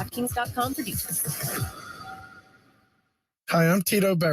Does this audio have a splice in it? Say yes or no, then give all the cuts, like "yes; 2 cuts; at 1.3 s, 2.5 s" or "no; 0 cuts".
yes; 1 cut; at 3.0 s